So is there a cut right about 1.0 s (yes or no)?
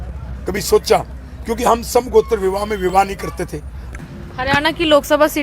no